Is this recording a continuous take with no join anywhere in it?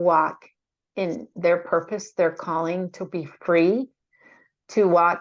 yes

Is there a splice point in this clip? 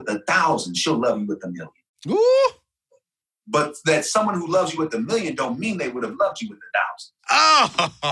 no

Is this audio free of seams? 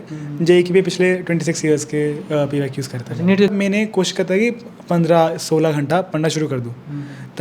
no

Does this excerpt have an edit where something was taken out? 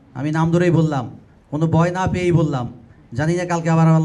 no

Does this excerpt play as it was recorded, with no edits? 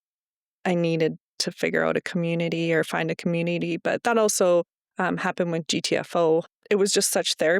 no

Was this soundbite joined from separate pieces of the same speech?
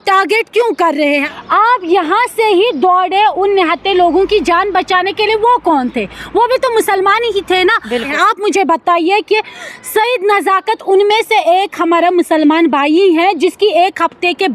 yes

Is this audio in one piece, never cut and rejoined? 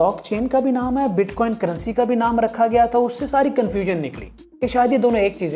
yes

